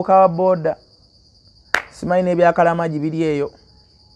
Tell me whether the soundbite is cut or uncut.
uncut